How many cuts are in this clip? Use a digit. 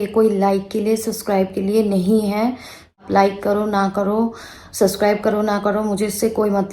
1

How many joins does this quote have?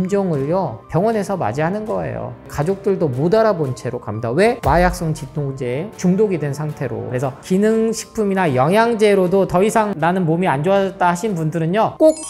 3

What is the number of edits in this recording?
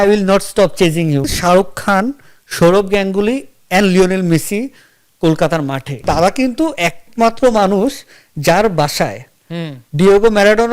2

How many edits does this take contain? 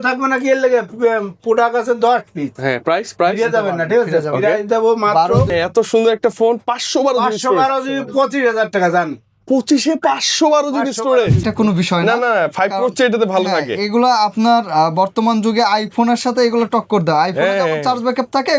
2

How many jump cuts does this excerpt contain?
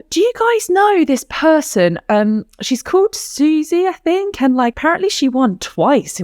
1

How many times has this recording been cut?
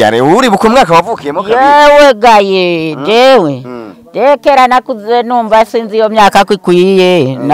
0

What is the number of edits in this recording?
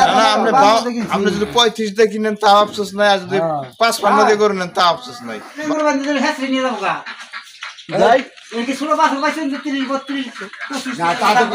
1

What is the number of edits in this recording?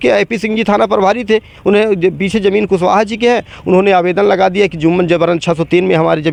0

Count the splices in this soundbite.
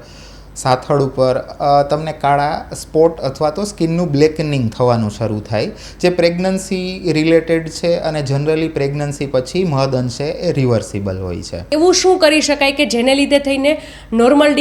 1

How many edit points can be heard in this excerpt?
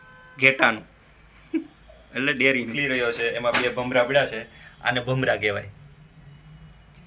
1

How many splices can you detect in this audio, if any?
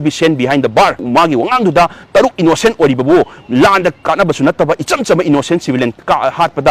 1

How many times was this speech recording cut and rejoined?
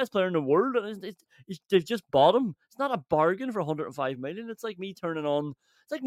0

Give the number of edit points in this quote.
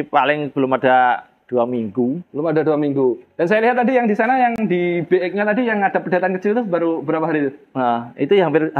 0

